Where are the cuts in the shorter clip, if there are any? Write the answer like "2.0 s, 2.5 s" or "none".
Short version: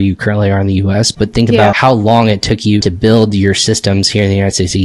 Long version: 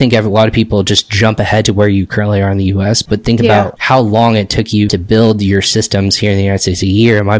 1.8 s